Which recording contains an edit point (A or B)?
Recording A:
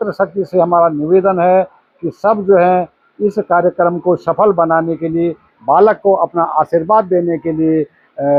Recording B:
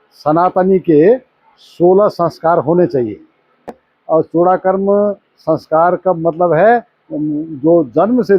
B